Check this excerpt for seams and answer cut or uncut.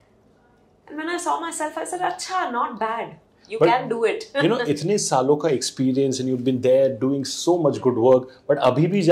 uncut